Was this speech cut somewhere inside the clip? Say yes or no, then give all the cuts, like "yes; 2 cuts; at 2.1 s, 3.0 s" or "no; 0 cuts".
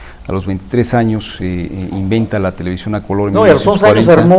no; 0 cuts